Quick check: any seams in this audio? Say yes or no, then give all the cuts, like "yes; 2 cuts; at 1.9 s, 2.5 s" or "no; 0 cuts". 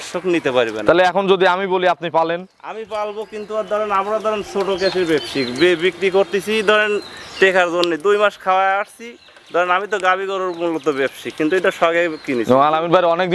no; 0 cuts